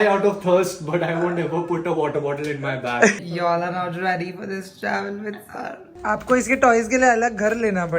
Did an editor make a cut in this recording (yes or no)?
yes